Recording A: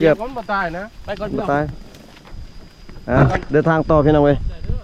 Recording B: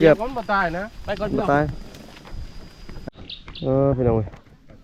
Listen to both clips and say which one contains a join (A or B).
B